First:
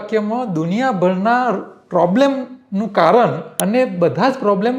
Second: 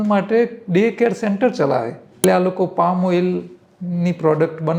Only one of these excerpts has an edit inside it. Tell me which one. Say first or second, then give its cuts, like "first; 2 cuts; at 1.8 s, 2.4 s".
second; 1 cut; at 2.0 s